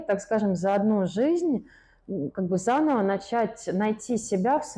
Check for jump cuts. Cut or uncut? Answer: uncut